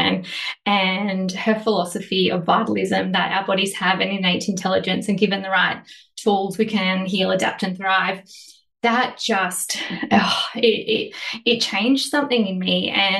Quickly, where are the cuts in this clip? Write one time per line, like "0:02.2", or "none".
none